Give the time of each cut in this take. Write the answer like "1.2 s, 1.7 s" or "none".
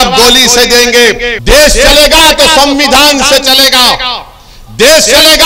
1.3 s

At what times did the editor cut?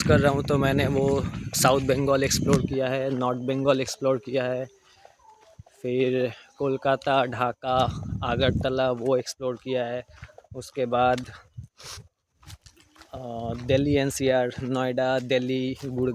none

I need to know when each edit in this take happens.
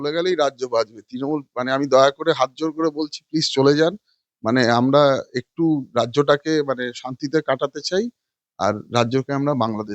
none

